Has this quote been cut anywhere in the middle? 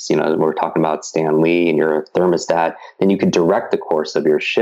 no; 0 cuts

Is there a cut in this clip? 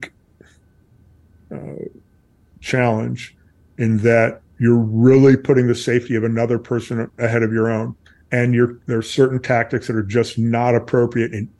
no; 0 cuts

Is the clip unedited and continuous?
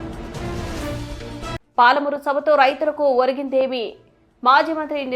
no; 1 cut; at 1.3 s

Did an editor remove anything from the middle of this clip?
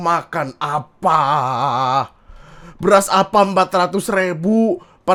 no; 0 cuts

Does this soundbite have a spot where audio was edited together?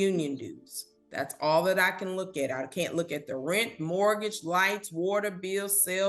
yes; 1 cut; at 2.7 s

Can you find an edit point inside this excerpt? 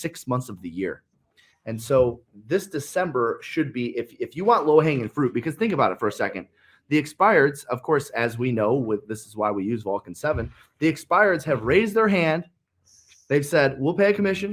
no; 0 cuts

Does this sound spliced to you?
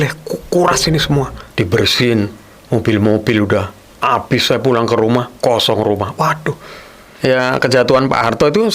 yes; 2 cuts; at 1.4 s, 7.1 s

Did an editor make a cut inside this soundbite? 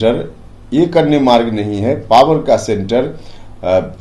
no; 0 cuts

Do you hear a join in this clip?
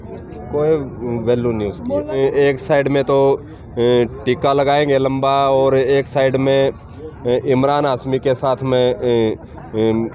yes; 1 cut; at 2.2 s

